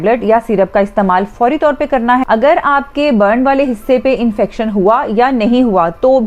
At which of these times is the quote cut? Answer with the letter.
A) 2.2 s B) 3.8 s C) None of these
A